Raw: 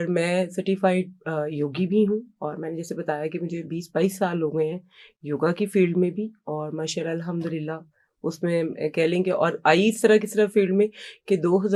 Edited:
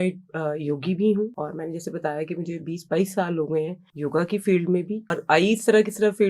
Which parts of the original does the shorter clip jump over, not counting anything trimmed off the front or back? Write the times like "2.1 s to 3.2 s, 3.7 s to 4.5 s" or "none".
2.3 s to 2.4 s, 4.9 s to 5.1 s, 6.5 s to 9.5 s